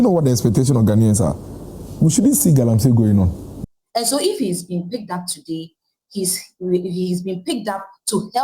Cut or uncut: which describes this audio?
cut